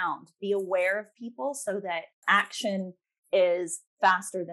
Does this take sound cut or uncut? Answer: uncut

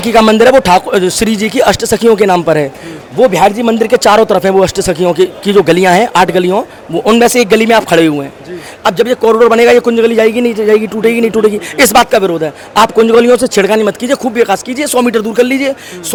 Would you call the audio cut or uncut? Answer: uncut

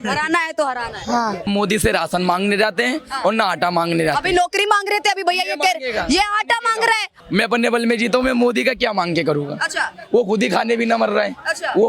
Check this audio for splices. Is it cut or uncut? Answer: cut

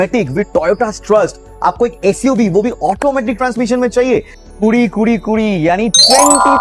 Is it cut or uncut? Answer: cut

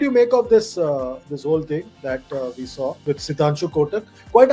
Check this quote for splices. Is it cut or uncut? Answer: cut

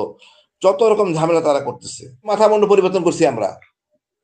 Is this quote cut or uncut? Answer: cut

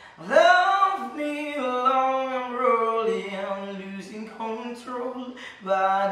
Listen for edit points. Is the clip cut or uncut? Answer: uncut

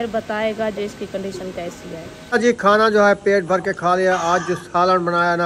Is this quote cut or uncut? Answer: cut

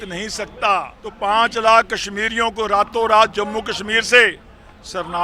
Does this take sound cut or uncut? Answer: cut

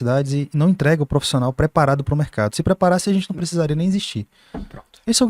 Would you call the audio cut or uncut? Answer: uncut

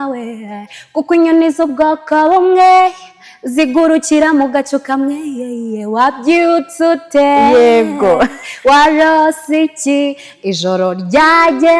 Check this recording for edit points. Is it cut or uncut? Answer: uncut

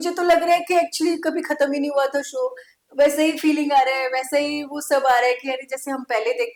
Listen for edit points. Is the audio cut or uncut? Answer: uncut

